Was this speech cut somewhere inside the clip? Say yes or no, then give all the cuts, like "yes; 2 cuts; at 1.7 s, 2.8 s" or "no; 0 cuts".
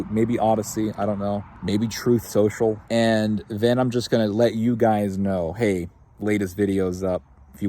yes; 2 cuts; at 1.5 s, 2.8 s